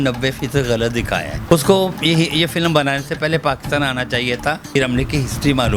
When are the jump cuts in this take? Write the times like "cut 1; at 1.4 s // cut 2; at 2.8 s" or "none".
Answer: cut 1; at 1.3 s // cut 2; at 4.8 s